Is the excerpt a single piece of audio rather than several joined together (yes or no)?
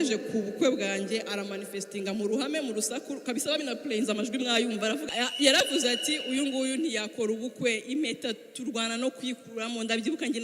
no